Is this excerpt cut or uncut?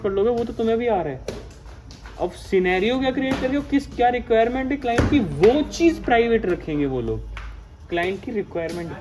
uncut